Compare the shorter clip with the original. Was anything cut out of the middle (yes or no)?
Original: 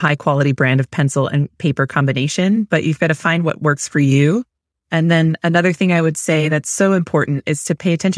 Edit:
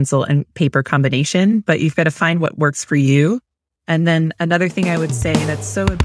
no